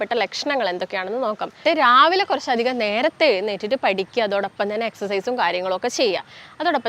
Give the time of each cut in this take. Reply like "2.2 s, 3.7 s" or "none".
1.6 s